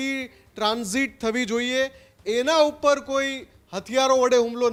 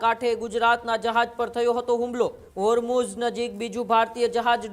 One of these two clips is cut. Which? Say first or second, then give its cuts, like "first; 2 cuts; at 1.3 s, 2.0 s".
second; 1 cut; at 2.4 s